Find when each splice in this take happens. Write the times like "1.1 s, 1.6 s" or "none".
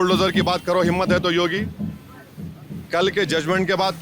none